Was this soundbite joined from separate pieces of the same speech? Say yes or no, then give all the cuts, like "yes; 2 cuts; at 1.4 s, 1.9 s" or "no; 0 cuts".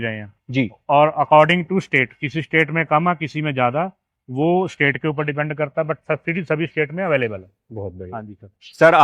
no; 0 cuts